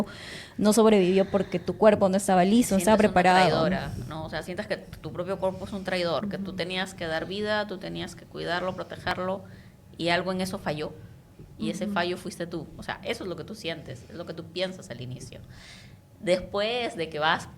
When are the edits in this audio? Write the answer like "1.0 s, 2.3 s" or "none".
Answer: 6.2 s